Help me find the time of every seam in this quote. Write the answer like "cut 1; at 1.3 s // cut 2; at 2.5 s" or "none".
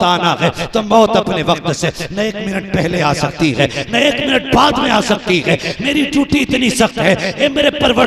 none